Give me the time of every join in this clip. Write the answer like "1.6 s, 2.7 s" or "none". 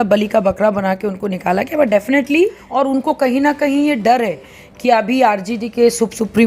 2.6 s